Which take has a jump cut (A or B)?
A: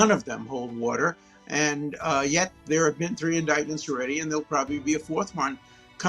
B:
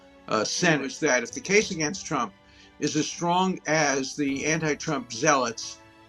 B